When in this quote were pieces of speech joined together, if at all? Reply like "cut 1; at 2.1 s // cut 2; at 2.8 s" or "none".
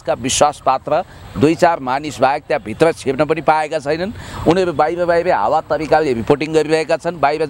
none